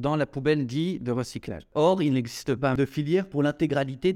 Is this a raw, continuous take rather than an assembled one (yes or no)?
no